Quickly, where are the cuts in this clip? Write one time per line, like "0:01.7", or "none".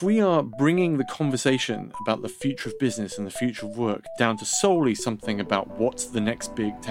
0:04.1